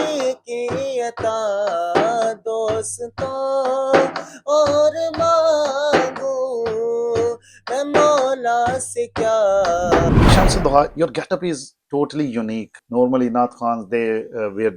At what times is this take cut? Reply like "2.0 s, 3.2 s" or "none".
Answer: 10.3 s, 12.8 s